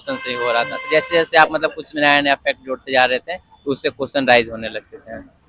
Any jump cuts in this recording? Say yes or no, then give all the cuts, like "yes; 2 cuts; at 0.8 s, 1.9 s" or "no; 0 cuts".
no; 0 cuts